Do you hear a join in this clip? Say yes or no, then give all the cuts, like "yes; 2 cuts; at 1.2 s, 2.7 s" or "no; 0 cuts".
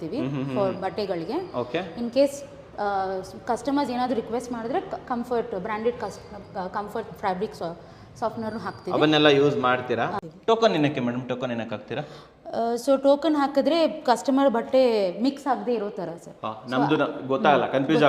yes; 1 cut; at 10.2 s